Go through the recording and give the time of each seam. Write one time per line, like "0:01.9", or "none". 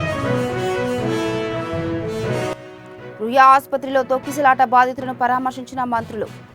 none